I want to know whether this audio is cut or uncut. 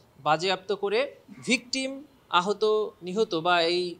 uncut